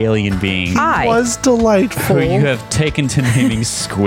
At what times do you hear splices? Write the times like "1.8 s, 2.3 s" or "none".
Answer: 3.1 s